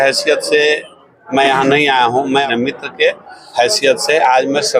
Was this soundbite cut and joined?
yes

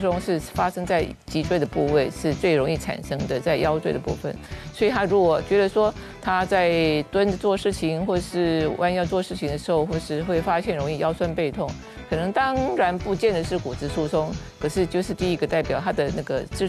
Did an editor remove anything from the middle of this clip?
no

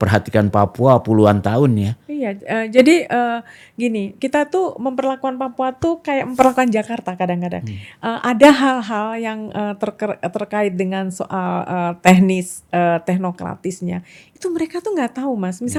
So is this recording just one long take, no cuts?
yes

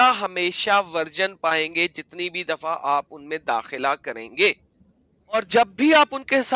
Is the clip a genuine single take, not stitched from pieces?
no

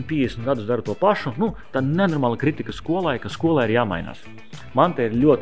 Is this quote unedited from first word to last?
yes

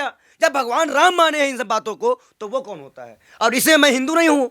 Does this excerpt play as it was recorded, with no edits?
yes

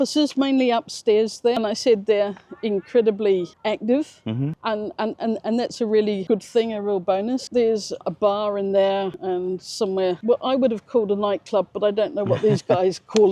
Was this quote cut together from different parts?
no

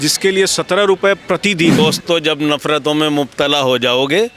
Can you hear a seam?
yes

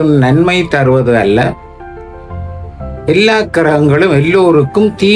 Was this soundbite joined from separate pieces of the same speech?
no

